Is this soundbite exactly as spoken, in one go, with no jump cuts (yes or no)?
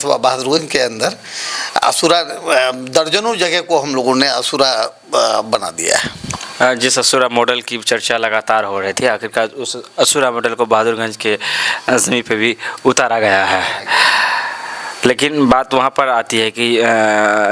yes